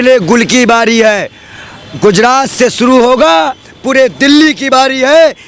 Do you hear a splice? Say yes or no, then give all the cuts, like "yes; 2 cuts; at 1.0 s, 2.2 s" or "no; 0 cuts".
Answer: no; 0 cuts